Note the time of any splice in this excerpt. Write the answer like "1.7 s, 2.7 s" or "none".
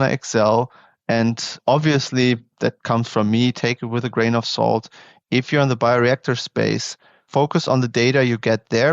2.8 s